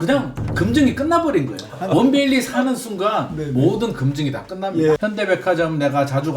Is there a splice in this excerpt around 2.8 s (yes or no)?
no